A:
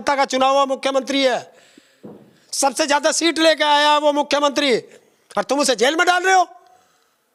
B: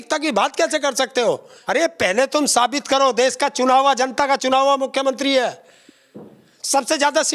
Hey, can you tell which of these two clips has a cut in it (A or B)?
B